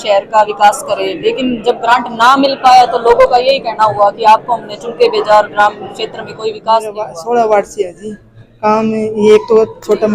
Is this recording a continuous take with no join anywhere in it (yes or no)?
no